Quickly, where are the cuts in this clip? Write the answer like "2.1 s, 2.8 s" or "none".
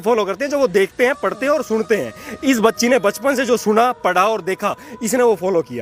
none